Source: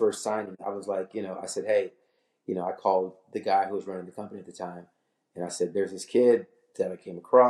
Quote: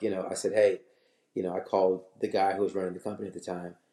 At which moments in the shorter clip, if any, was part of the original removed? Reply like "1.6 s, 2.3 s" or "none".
none